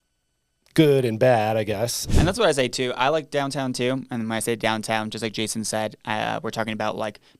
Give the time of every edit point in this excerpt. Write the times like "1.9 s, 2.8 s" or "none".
2.0 s